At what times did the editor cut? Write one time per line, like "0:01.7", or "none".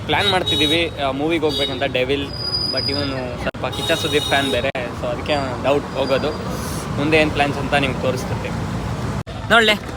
none